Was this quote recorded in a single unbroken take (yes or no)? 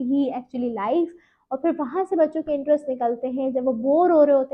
yes